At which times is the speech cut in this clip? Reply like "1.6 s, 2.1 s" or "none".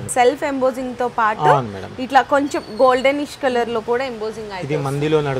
none